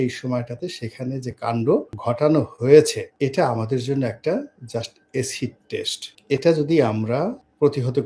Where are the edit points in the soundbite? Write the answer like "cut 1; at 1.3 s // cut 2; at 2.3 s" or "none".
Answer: none